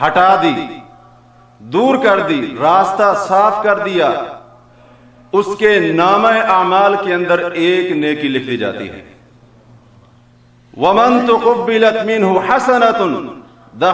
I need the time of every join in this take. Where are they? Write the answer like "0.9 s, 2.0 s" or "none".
none

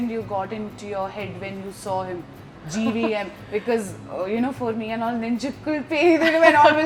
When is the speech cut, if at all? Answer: none

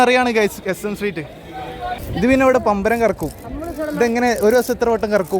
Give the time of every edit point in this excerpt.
2.2 s

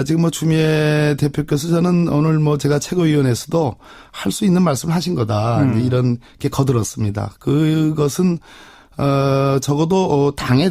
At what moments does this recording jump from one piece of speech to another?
7.6 s

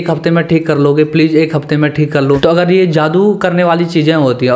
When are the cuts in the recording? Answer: 2.2 s

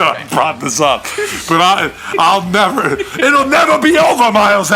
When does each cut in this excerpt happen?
none

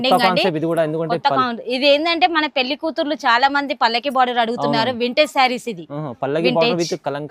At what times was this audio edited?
none

